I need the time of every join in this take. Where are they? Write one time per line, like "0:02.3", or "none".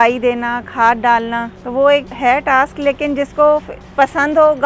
0:01.6
0:02.1
0:03.8